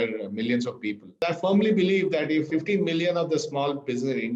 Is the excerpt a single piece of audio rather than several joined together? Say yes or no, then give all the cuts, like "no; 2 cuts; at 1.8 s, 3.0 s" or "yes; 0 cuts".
no; 2 cuts; at 1.2 s, 2.5 s